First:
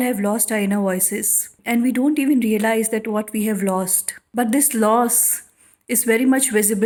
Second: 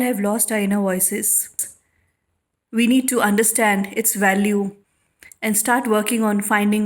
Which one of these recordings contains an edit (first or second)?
second